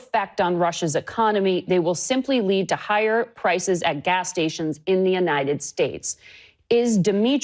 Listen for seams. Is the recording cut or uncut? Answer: uncut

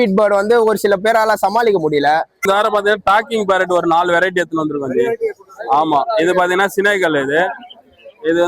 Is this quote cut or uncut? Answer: cut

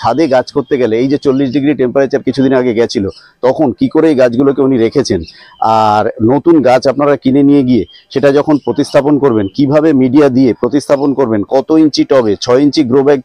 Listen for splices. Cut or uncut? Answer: uncut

